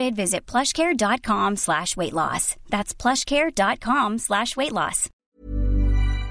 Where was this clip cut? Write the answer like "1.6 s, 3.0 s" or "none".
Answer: 5.3 s